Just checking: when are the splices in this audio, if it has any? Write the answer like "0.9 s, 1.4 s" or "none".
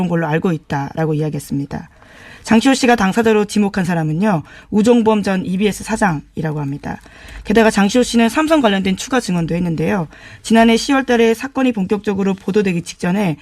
5.5 s